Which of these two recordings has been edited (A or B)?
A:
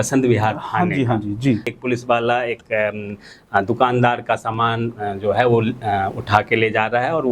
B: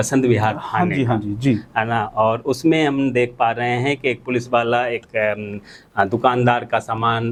A